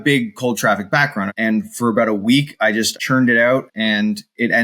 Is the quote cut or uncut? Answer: cut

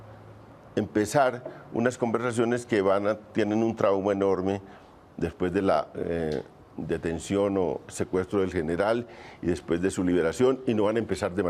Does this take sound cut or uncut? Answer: uncut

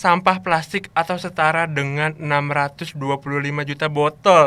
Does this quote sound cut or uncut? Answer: uncut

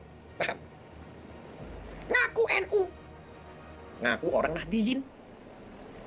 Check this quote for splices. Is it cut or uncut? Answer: uncut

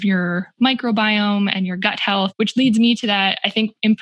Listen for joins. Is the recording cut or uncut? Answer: cut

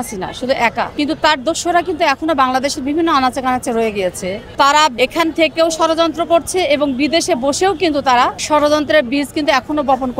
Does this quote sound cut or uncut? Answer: cut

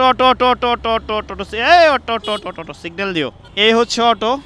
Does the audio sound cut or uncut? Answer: cut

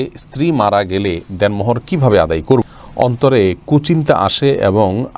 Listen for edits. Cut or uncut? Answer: cut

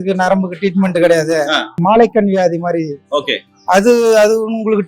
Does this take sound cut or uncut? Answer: cut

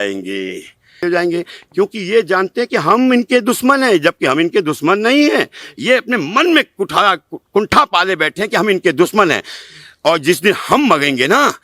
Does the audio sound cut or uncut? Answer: cut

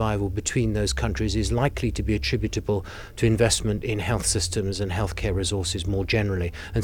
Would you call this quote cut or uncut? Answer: uncut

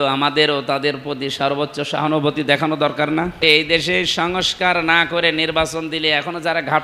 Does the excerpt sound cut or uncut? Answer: cut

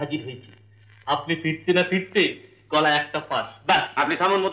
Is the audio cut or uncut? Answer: uncut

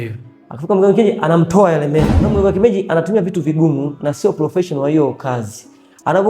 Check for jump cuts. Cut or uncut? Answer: cut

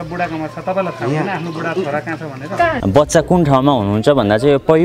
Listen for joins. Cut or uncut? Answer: cut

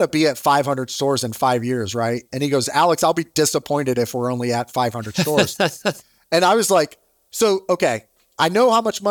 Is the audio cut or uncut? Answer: uncut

